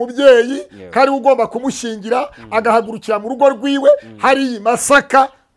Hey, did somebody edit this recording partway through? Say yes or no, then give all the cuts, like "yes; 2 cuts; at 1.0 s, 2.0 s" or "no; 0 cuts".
no; 0 cuts